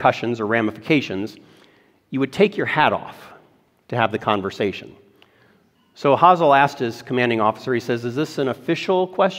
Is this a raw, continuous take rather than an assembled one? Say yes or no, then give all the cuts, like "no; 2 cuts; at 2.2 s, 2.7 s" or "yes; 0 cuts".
yes; 0 cuts